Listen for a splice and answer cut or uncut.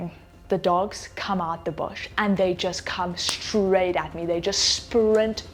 uncut